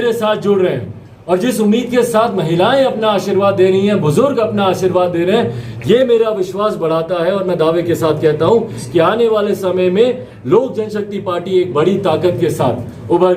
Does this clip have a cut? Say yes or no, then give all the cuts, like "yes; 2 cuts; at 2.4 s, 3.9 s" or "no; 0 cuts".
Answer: no; 0 cuts